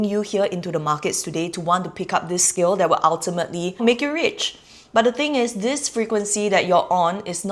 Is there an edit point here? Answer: yes; 1 cut; at 3.8 s

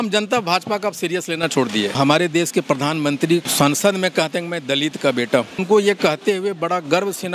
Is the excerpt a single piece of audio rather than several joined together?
no; 3 cuts; at 2.0 s, 3.5 s, 5.6 s

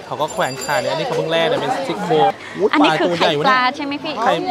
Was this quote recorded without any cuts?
no; 1 cut; at 2.4 s

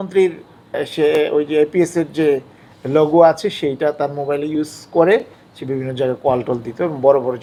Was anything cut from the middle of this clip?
no; 0 cuts

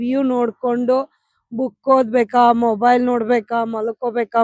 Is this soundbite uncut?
yes; 0 cuts

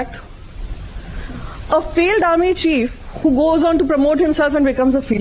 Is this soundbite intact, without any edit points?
yes; 0 cuts

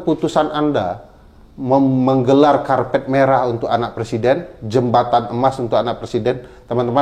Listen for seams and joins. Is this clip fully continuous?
yes; 0 cuts

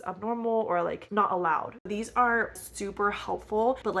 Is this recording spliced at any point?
yes; 3 cuts; at 1.0 s, 1.9 s, 2.6 s

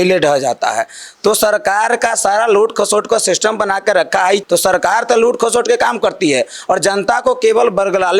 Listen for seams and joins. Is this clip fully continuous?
yes; 0 cuts

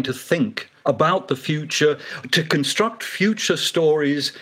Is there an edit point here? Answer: no; 0 cuts

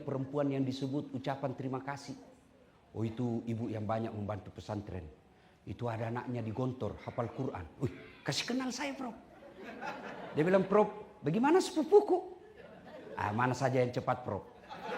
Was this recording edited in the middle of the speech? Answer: no; 0 cuts

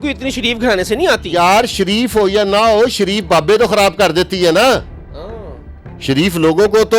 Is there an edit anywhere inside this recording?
no; 0 cuts

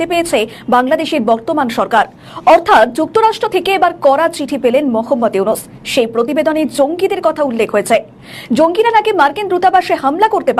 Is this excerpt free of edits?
yes; 0 cuts

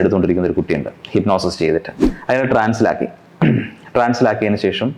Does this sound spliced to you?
yes; 1 cut; at 2.0 s

